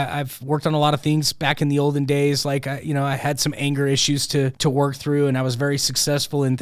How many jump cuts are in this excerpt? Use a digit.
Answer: 1